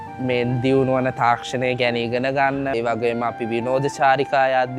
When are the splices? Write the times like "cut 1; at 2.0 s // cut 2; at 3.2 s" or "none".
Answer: cut 1; at 2.7 s